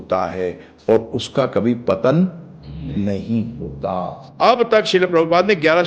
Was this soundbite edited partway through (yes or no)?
yes